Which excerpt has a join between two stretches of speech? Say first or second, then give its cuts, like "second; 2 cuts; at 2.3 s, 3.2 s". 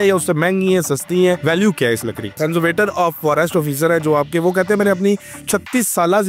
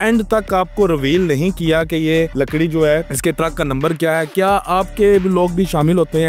first; 1 cut; at 2.4 s